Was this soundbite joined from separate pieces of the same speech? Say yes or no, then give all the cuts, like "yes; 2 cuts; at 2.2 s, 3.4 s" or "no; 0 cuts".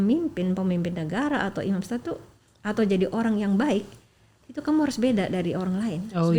no; 0 cuts